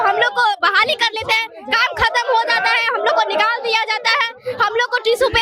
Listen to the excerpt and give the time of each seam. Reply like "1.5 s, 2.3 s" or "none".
none